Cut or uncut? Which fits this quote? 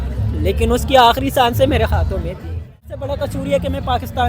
cut